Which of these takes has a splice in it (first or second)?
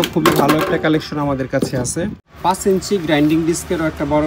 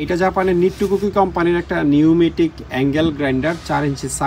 first